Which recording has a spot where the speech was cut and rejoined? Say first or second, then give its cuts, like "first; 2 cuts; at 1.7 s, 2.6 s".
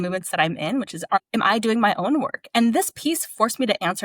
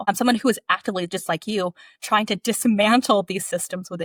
first; 1 cut; at 1.2 s